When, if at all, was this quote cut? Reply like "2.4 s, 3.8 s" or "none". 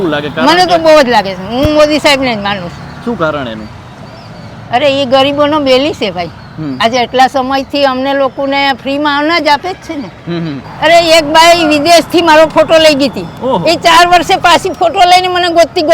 10.6 s